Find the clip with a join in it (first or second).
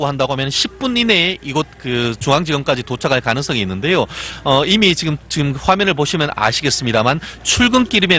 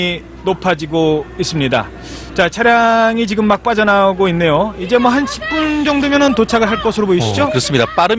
first